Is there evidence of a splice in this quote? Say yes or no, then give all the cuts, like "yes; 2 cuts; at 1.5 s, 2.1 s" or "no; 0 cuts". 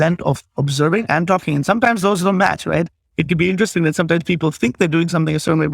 no; 0 cuts